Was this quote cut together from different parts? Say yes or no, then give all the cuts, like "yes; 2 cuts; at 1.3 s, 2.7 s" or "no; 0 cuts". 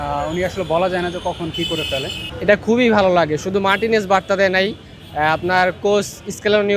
yes; 1 cut; at 2.2 s